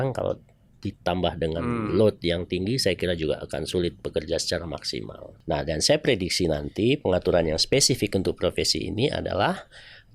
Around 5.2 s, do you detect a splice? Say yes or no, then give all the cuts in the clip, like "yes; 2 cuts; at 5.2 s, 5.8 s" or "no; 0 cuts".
yes; 1 cut; at 5.2 s